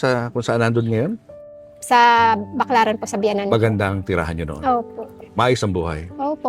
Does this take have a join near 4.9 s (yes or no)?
no